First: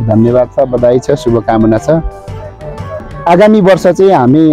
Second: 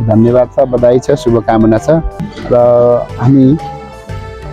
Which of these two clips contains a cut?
second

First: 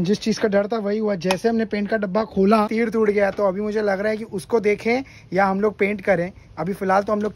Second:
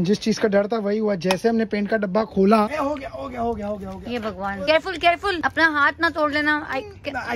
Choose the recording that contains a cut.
second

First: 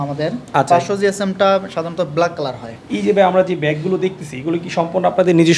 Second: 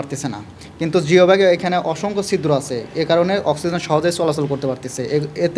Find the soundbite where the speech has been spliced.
first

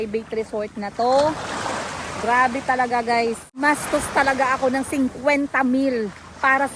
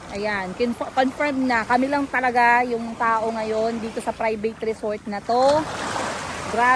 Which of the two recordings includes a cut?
first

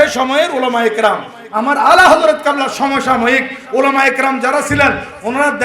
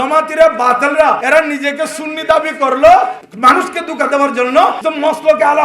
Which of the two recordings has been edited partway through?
second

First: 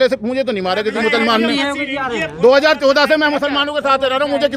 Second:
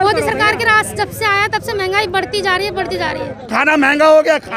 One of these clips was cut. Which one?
second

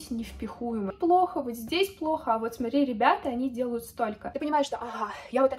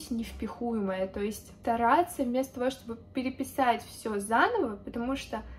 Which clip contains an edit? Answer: first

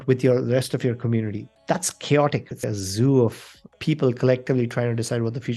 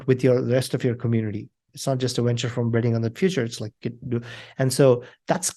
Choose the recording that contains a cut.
first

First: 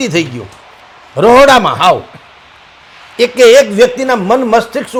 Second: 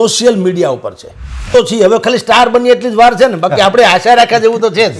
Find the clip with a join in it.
second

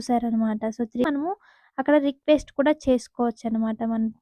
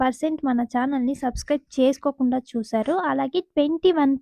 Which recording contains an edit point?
first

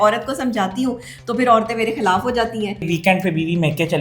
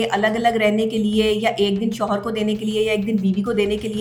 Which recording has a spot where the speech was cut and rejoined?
first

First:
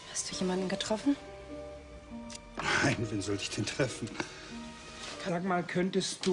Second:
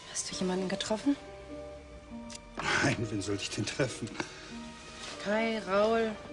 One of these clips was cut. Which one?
second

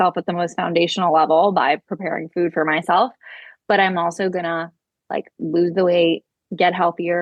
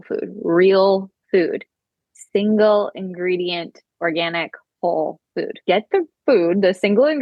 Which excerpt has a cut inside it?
second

